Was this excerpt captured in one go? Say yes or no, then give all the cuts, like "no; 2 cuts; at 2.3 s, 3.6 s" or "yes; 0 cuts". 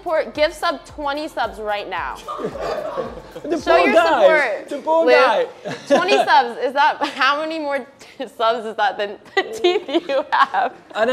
yes; 0 cuts